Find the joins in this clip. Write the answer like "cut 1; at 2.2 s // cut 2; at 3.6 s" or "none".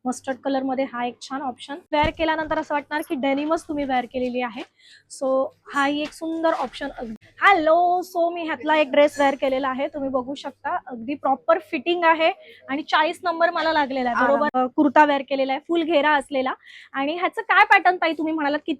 cut 1; at 1.9 s // cut 2; at 7.0 s // cut 3; at 14.5 s

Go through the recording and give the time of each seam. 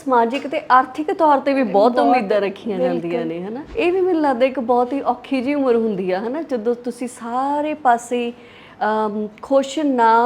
cut 1; at 3.6 s

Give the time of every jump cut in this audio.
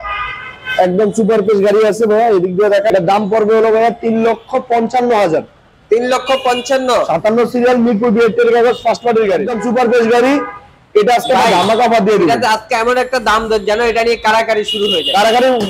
cut 1; at 2.9 s // cut 2; at 9.5 s

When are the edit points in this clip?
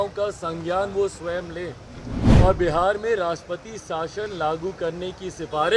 none

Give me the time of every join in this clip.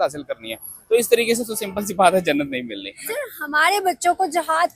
cut 1; at 3.3 s

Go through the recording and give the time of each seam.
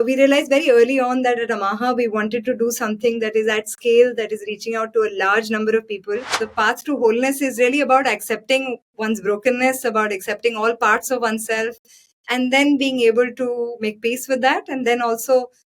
cut 1; at 6.4 s

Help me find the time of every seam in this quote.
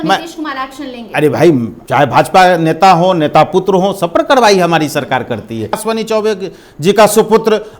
cut 1; at 1.8 s // cut 2; at 5.8 s

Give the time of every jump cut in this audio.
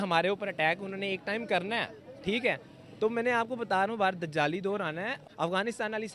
cut 1; at 5.2 s

